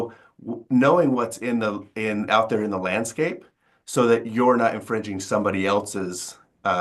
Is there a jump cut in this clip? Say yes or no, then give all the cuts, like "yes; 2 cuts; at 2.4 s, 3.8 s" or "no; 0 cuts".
no; 0 cuts